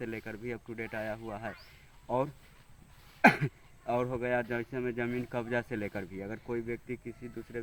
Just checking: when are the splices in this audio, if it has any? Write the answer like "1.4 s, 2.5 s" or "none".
none